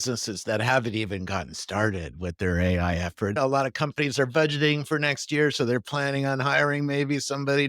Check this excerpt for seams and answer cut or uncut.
cut